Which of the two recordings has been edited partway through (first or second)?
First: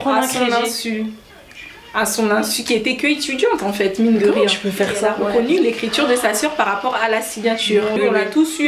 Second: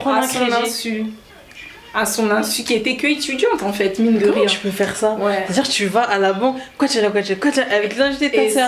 first